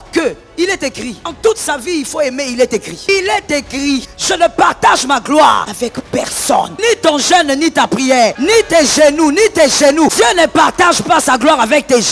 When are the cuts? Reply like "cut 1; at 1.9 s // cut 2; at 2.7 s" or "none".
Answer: cut 1; at 1.3 s // cut 2; at 3.1 s // cut 3; at 4.1 s // cut 4; at 5.7 s // cut 5; at 6.7 s // cut 6; at 8.4 s // cut 7; at 10.1 s